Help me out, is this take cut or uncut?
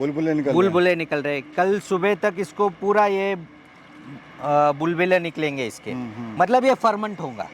uncut